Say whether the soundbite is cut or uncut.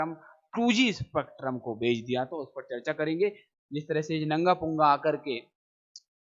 cut